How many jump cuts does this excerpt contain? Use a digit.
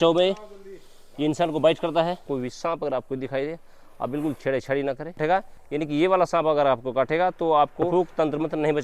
3